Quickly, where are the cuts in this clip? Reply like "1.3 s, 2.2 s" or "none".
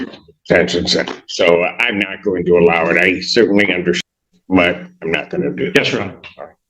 4.0 s